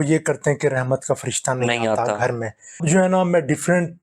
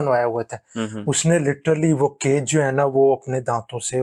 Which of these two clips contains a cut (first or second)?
first